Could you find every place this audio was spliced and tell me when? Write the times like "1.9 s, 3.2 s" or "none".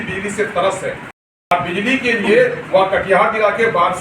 1.2 s